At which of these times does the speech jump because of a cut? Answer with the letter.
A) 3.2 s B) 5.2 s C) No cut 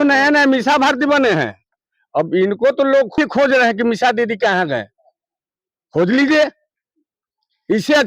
A